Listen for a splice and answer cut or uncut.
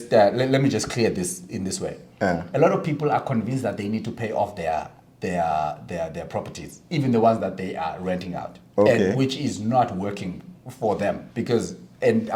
uncut